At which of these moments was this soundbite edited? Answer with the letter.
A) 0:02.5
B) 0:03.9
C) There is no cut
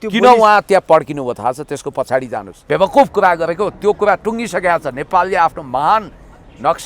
C